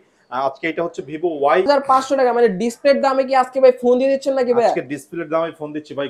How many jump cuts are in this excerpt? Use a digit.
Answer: 1